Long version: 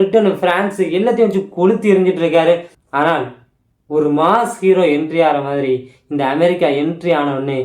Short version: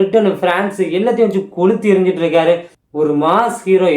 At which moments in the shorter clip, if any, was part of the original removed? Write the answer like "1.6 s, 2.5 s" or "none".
2.8 s